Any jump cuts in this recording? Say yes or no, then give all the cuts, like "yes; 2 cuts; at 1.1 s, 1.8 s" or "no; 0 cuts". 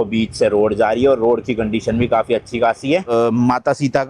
yes; 1 cut; at 3.1 s